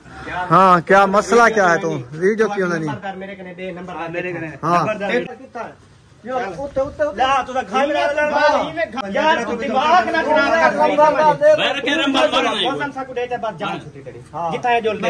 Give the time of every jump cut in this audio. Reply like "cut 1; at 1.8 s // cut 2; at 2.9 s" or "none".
cut 1; at 5.2 s // cut 2; at 9.0 s